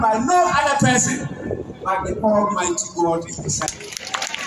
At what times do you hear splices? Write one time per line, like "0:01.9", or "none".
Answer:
none